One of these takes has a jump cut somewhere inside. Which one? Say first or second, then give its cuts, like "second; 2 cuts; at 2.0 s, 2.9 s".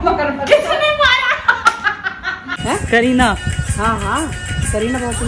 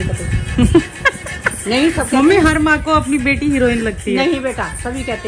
first; 1 cut; at 2.5 s